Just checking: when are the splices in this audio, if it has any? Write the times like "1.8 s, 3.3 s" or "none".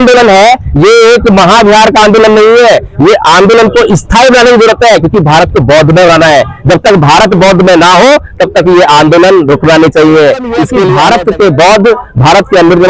10.8 s